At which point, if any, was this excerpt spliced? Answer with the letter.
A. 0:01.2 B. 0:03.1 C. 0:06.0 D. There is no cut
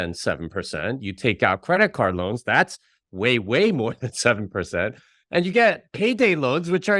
D